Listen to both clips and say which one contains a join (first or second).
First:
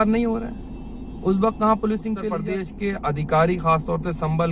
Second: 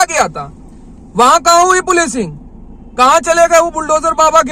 first